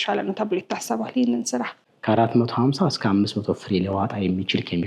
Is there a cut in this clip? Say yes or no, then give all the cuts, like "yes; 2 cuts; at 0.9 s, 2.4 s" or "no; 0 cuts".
yes; 1 cut; at 1.7 s